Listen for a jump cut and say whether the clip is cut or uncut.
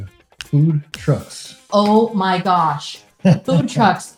uncut